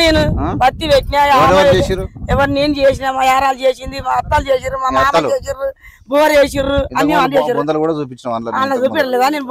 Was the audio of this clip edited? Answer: no; 0 cuts

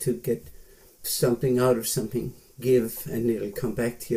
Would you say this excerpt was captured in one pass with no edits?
yes; 0 cuts

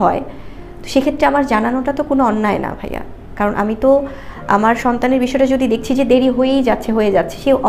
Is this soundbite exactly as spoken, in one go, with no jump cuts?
yes; 0 cuts

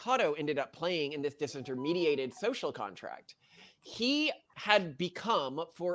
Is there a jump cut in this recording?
yes; 1 cut; at 4.5 s

